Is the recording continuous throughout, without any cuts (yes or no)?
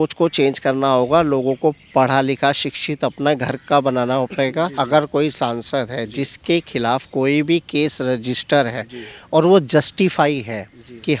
no